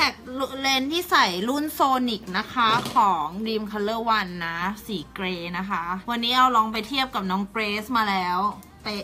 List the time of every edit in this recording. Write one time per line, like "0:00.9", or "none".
0:06.0